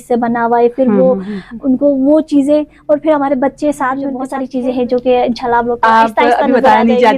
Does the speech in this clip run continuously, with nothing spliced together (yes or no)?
no